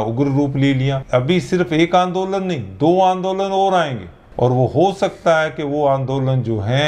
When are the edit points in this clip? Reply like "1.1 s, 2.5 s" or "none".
1.0 s